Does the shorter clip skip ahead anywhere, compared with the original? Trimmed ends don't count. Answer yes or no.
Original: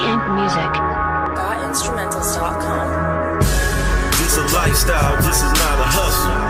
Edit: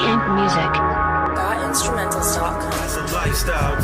yes